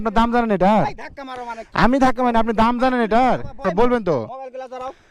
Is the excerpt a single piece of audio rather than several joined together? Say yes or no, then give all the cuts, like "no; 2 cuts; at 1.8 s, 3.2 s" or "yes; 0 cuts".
no; 1 cut; at 3.6 s